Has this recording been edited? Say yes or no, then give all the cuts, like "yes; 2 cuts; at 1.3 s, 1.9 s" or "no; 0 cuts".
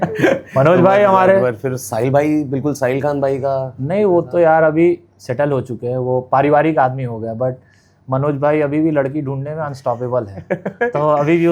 no; 0 cuts